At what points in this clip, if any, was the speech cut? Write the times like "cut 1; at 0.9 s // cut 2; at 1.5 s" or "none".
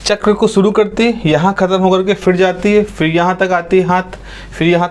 none